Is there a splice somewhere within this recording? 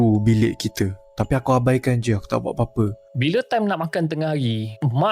yes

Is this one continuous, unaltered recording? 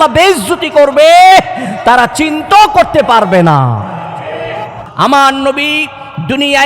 no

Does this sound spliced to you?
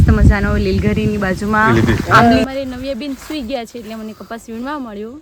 yes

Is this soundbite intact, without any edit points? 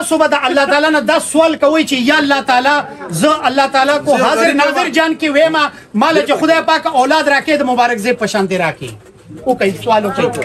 yes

